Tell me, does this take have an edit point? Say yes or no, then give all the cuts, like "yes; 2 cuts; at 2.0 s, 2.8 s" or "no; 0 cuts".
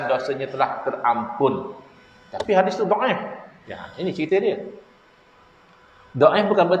no; 0 cuts